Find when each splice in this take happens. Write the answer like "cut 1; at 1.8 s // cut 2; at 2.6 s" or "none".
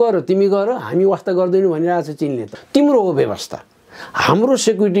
cut 1; at 2.4 s